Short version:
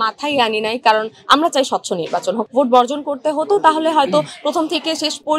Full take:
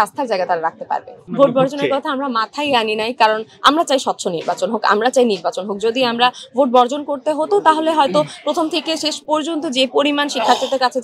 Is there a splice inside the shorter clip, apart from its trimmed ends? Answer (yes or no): yes